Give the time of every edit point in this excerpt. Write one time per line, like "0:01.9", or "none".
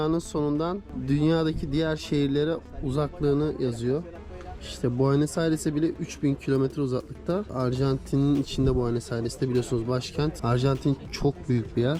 0:00.9
0:07.5
0:10.4

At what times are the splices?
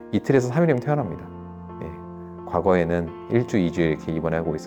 none

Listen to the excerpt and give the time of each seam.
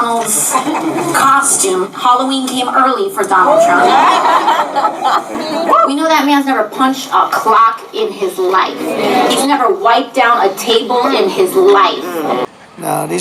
0:05.4
0:12.4

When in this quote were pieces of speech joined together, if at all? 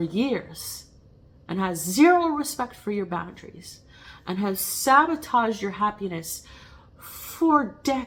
none

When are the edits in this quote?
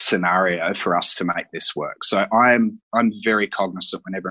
none

